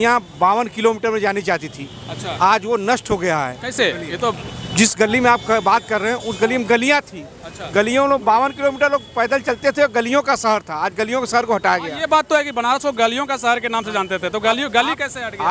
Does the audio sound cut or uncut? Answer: uncut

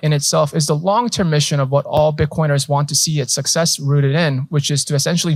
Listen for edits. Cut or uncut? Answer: uncut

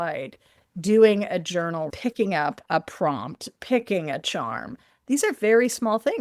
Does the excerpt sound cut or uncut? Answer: cut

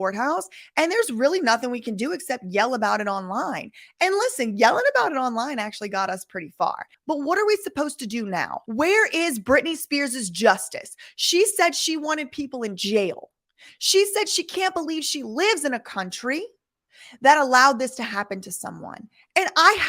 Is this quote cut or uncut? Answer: cut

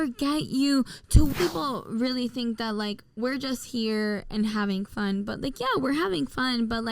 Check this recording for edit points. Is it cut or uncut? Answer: cut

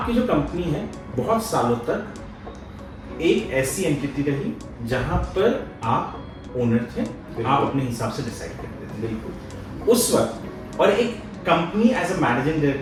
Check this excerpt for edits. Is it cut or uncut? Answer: uncut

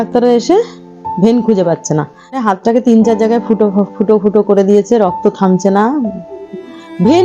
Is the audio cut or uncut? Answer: cut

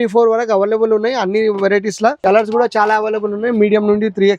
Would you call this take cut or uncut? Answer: cut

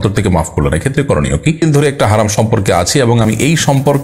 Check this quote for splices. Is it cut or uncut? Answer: cut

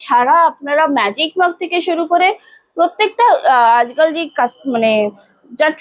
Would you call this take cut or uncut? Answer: uncut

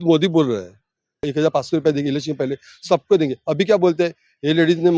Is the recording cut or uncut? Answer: cut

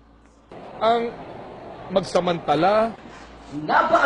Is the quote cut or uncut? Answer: uncut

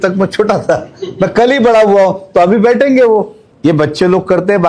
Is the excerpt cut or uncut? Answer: cut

